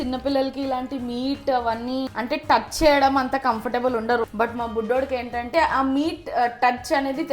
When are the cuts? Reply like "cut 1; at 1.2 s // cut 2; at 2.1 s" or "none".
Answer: cut 1; at 2.1 s // cut 2; at 4.3 s // cut 3; at 5.5 s